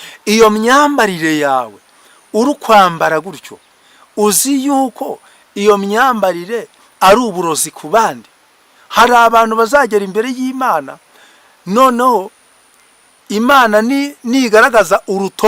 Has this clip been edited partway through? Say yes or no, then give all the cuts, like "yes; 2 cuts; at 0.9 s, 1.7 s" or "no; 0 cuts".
no; 0 cuts